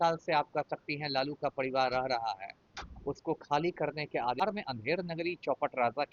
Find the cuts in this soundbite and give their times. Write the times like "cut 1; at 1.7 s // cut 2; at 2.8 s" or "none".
cut 1; at 4.4 s